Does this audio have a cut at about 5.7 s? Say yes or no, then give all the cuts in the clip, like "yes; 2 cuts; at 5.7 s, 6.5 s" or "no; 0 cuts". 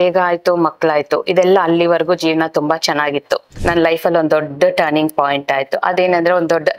no; 1 cut; at 3.5 s